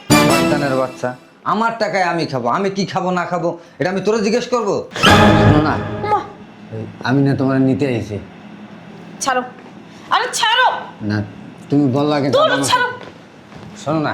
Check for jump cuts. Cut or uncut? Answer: cut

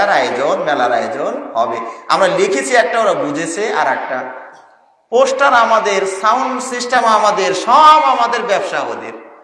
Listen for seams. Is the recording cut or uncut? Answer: uncut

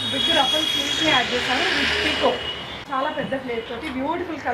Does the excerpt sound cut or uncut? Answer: cut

